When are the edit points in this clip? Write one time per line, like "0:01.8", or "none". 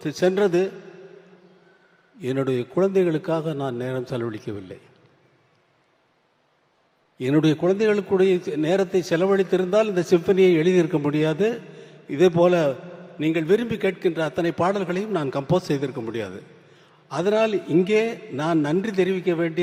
none